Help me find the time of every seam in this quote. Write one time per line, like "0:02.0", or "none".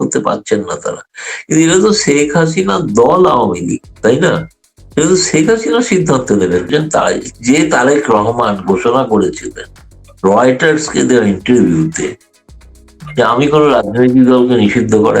0:06.7

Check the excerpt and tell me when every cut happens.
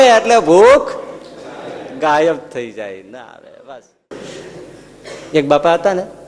0:04.1

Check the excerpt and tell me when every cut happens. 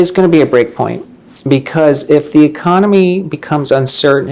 none

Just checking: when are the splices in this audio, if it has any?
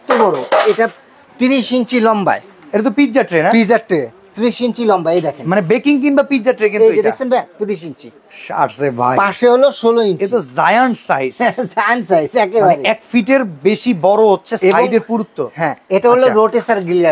none

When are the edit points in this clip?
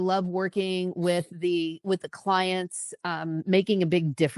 none

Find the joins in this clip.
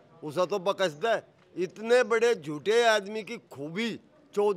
none

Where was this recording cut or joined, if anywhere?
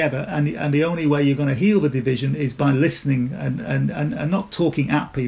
0:02.5

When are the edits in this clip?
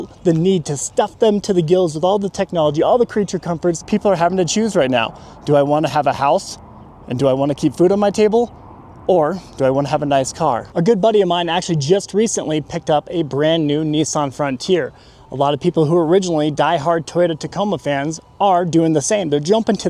0:03.8
0:10.7

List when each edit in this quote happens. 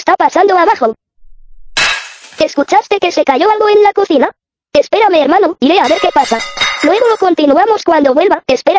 none

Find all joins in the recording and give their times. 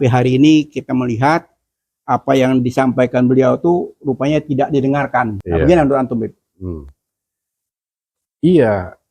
0:05.4

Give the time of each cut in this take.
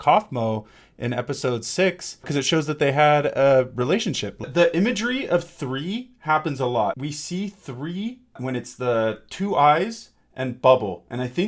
0:02.3
0:04.4
0:07.0

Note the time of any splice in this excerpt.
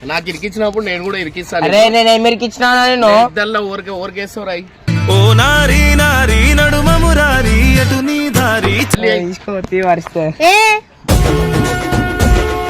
none

